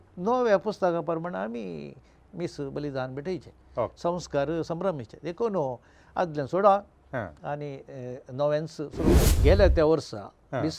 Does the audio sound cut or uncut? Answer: cut